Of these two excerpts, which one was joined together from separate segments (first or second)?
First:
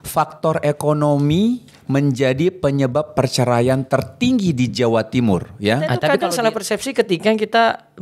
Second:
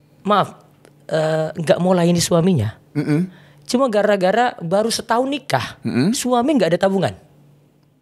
first